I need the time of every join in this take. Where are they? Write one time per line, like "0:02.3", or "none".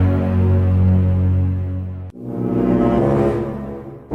none